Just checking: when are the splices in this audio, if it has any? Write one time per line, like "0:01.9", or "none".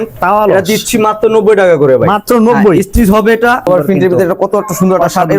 0:03.7